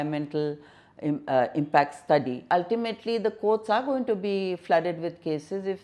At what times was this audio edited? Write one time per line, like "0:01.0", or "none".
0:02.5

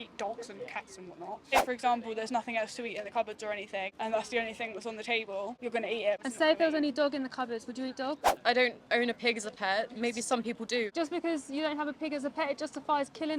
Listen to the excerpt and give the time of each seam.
0:01.5
0:03.9
0:06.0
0:08.3
0:10.9

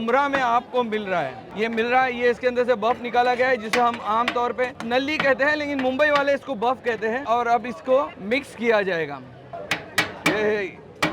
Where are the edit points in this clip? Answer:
none

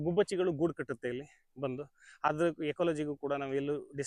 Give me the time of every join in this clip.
none

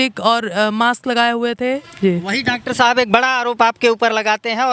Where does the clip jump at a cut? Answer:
0:01.9

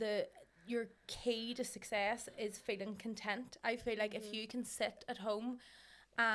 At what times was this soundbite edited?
none

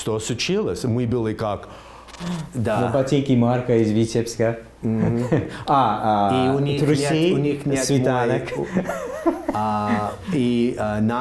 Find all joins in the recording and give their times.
0:02.1

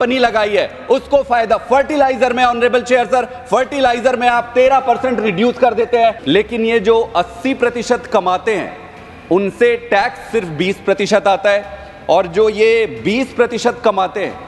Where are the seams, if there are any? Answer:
0:06.2

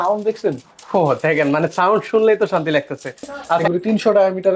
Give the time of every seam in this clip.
0:03.6

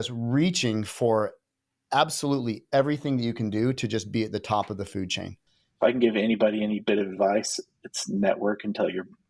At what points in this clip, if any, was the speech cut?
0:05.5

